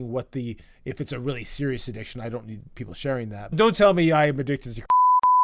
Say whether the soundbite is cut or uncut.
cut